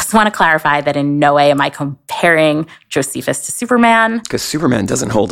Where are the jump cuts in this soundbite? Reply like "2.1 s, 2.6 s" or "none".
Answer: none